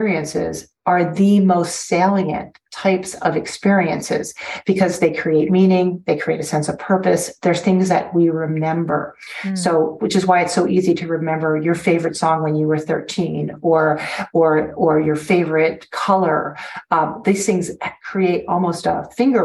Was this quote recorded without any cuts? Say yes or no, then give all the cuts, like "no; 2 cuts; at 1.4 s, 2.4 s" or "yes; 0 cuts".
yes; 0 cuts